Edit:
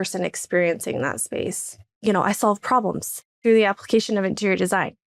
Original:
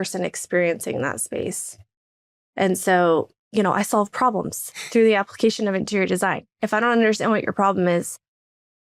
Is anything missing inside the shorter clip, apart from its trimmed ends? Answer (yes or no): yes